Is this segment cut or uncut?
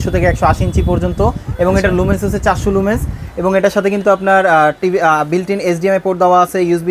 uncut